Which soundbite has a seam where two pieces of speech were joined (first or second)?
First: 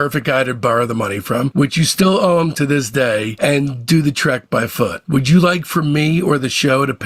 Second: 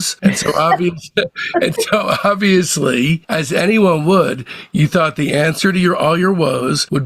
first